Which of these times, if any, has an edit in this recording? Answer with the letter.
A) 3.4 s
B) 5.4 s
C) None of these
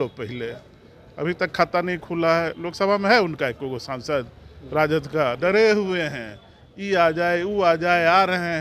B